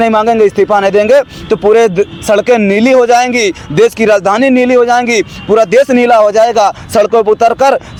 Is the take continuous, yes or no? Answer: yes